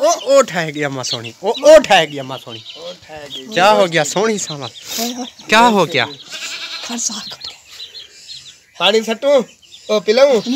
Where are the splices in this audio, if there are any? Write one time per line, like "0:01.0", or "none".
none